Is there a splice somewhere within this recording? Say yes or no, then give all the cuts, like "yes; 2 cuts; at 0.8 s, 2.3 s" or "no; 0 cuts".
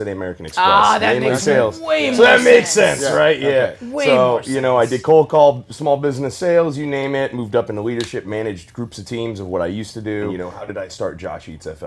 yes; 1 cut; at 10.3 s